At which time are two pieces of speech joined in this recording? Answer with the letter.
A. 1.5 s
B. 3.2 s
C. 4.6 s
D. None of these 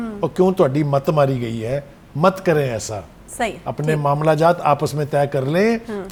D